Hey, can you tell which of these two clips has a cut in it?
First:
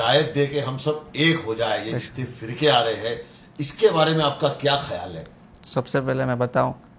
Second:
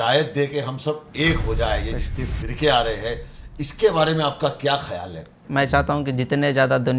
second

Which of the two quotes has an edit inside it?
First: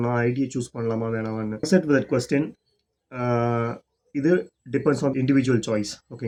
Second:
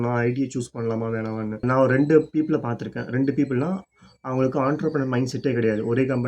second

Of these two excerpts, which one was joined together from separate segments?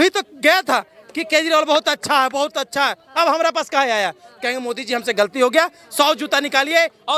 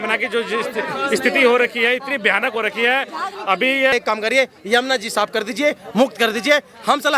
second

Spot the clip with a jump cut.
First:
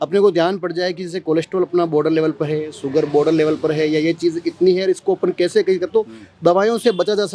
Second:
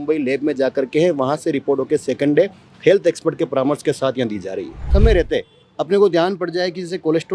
second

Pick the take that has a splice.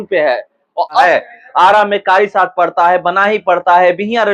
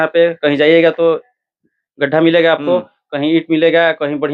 first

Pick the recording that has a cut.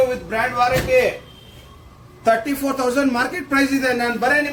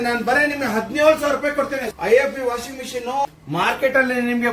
second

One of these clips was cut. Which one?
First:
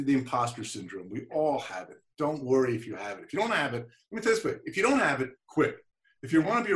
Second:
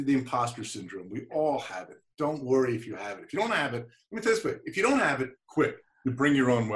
second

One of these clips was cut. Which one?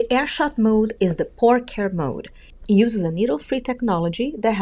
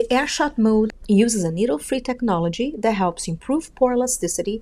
second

